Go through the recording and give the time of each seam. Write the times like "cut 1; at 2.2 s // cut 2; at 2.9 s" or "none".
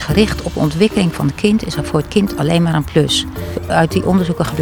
cut 1; at 3.6 s